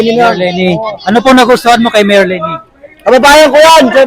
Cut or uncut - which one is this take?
uncut